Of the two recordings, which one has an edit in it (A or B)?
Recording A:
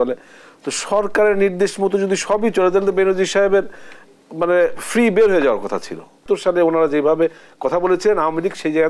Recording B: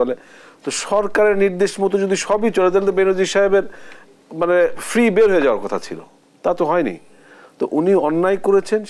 A